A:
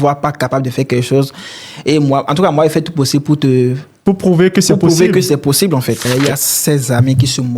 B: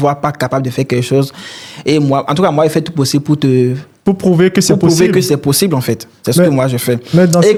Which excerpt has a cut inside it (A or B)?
A